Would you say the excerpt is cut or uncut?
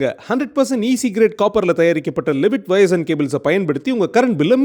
uncut